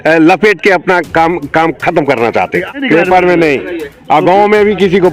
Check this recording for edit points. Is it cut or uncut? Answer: cut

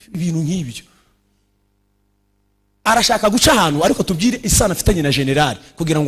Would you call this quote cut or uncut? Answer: uncut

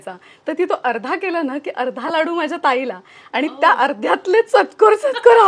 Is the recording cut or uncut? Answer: uncut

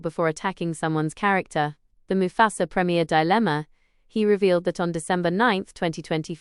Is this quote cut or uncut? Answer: uncut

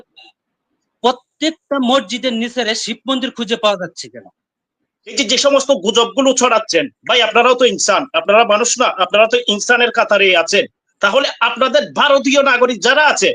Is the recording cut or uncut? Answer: cut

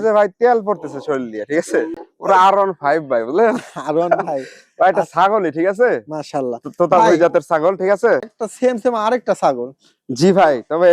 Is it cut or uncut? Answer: cut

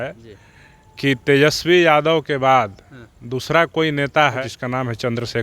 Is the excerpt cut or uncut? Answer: cut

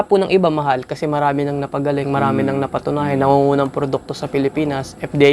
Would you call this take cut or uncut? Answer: uncut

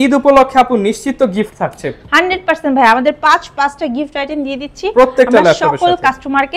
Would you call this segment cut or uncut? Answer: uncut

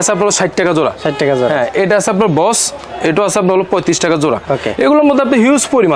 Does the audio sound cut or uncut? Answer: uncut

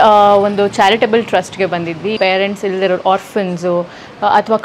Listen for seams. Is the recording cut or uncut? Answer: cut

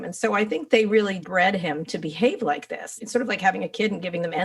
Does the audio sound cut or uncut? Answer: cut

